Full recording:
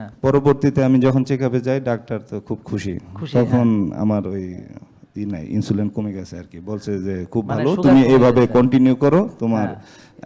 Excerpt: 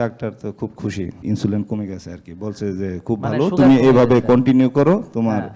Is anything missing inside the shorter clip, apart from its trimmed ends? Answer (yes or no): yes